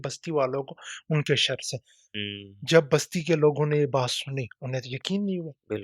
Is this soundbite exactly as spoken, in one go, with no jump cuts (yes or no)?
no